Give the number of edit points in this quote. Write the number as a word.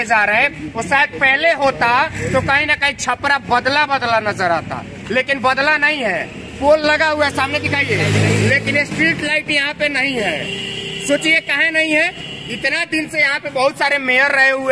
zero